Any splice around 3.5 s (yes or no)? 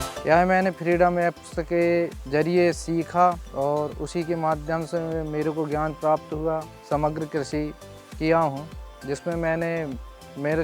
yes